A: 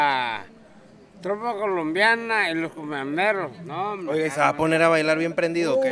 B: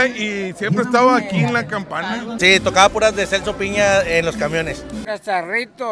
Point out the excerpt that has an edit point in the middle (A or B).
B